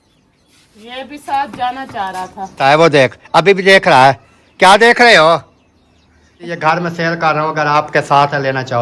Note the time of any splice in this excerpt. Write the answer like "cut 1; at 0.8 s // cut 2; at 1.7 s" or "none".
cut 1; at 2.6 s // cut 2; at 6.6 s